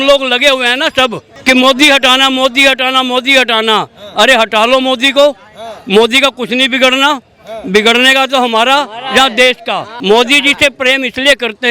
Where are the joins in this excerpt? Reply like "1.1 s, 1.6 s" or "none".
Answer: 1.3 s, 9.9 s